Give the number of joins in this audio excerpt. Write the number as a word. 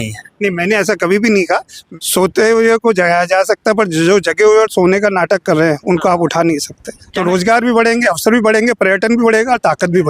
two